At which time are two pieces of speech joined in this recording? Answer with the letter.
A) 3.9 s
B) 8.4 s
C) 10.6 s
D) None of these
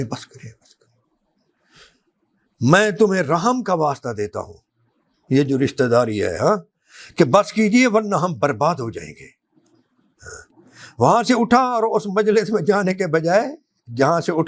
D